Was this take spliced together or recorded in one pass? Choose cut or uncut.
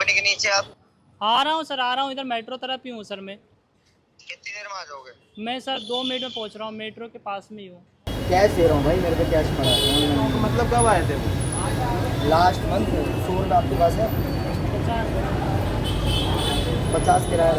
cut